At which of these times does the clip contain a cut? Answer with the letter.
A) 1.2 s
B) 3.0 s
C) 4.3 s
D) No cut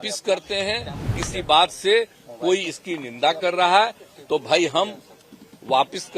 A